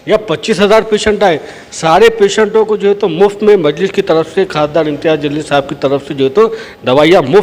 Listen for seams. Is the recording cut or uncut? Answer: uncut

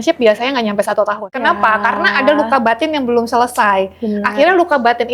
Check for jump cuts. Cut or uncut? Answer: cut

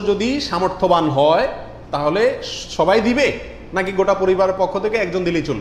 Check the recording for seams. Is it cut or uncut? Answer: uncut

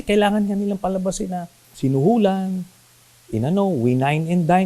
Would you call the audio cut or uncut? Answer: cut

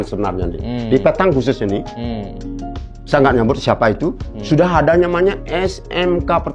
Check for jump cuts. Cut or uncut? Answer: uncut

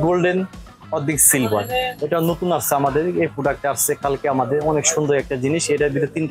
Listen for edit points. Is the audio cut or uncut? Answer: cut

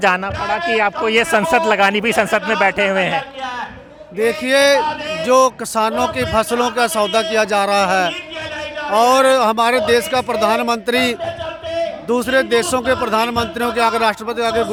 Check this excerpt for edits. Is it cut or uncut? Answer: uncut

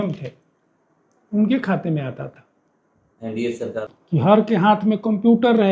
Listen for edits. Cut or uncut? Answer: cut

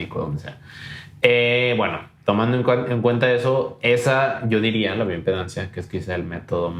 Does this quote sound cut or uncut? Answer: uncut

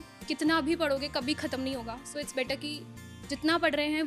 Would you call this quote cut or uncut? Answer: uncut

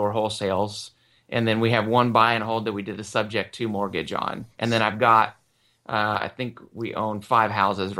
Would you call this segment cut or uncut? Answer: uncut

